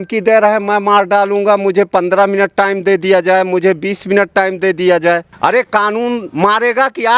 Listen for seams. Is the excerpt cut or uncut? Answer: uncut